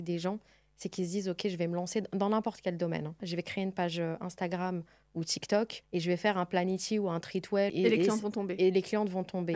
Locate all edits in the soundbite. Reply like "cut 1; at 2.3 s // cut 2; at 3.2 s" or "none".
cut 1; at 3.2 s // cut 2; at 5.8 s // cut 3; at 7.7 s